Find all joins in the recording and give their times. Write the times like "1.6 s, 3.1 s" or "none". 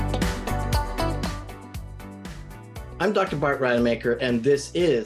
3.0 s